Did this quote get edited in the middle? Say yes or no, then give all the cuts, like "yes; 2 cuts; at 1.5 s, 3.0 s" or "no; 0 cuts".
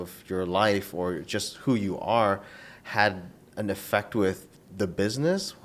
no; 0 cuts